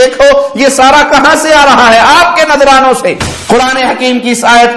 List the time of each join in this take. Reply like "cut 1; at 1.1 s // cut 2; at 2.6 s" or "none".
cut 1; at 3.3 s